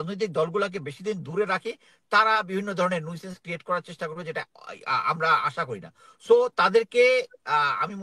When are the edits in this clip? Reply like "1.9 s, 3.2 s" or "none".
none

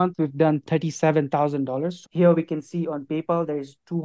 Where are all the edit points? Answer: 2.0 s

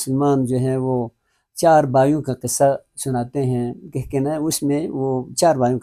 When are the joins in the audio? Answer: none

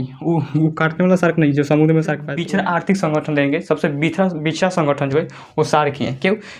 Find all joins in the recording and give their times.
2.3 s

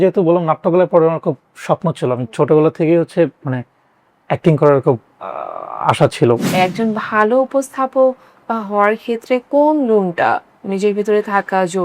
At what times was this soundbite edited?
6.5 s

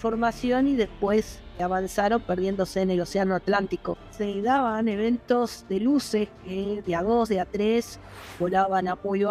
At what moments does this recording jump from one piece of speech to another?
1.6 s, 4.1 s

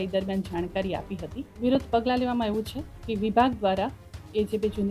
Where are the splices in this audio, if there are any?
1.5 s

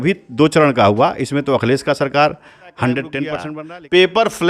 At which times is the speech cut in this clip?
3.5 s

